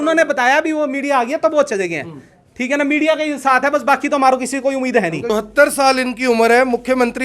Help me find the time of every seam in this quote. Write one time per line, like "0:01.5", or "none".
0:05.2